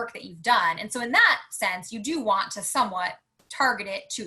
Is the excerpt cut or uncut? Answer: uncut